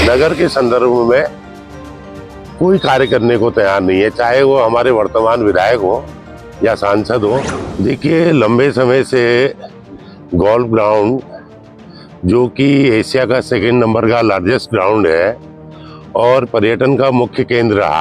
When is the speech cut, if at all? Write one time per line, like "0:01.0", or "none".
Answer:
0:07.6